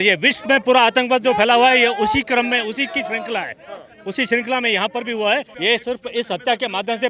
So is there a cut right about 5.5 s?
yes; 1 cut; at 5.5 s

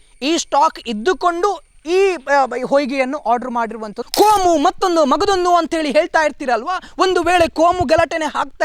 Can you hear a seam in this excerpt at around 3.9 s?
yes; 1 cut; at 3.9 s

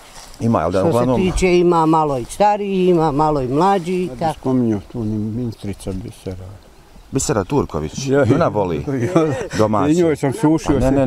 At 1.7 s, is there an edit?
no; 1 cut; at 4.4 s

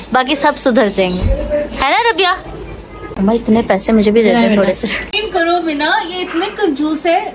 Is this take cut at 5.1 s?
yes; 2 cuts; at 3.1 s, 5.1 s

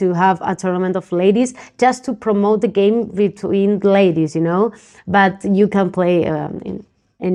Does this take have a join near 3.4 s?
no; 0 cuts

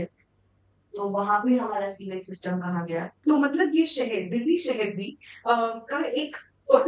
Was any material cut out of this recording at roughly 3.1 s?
yes; 1 cut; at 3.1 s

